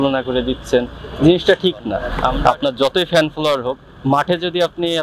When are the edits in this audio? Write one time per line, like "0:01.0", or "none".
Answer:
0:02.0